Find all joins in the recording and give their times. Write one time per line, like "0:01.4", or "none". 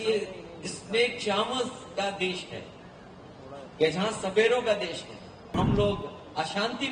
0:05.5